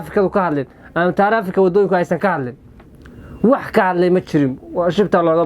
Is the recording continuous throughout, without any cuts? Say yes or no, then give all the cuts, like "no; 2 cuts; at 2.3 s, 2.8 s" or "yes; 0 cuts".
yes; 0 cuts